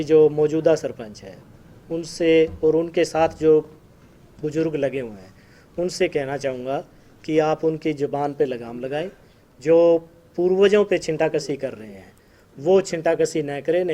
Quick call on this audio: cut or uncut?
uncut